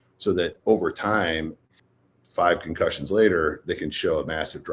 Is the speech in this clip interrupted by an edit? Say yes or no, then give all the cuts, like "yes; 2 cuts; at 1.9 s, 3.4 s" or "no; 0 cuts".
yes; 1 cut; at 1.7 s